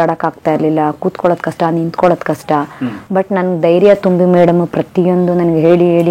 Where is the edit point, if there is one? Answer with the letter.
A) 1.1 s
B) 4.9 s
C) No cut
C